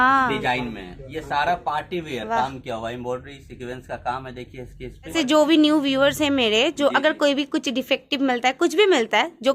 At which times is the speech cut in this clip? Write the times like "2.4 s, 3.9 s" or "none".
5.1 s